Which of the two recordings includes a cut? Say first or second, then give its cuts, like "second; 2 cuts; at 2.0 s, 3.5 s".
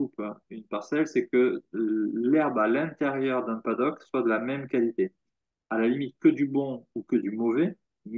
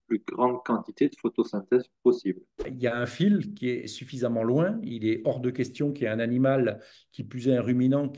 second; 1 cut; at 2.7 s